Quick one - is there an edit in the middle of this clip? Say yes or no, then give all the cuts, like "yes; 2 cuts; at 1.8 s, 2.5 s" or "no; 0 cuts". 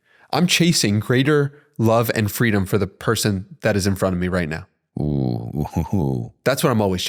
no; 0 cuts